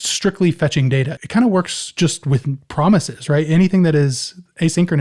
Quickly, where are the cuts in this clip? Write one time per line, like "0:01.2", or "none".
0:01.1